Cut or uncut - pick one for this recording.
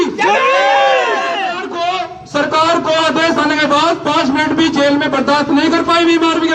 uncut